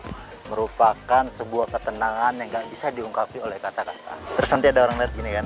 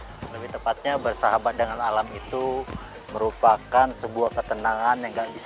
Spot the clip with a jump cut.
first; 1 cut; at 4.2 s

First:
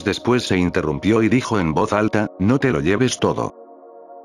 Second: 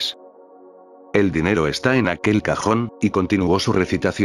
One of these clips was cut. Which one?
first; 1 cut; at 1.9 s

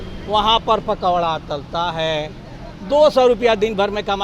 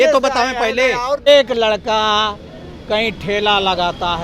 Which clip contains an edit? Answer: second; 1 cut; at 1.3 s

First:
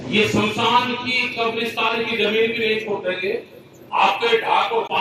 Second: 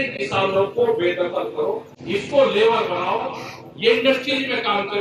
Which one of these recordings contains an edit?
second; 1 cut; at 1.9 s

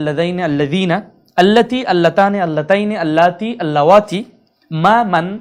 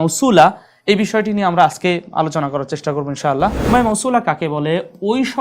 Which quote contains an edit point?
second; 1 cut; at 3.6 s

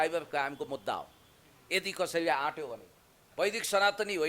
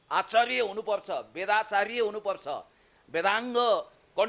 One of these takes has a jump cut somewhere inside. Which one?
first; 1 cut; at 3.3 s

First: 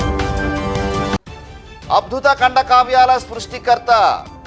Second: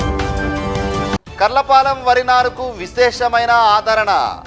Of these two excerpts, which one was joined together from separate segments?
first; 1 cut; at 1.3 s

